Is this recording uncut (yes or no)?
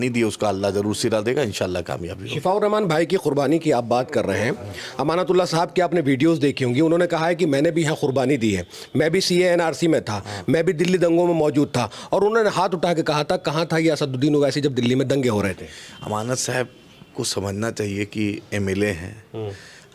yes